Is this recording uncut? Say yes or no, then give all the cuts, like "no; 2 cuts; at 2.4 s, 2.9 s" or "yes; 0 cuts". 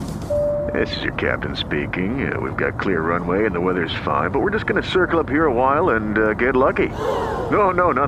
yes; 0 cuts